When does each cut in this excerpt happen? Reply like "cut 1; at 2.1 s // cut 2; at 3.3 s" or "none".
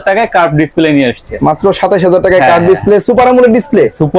none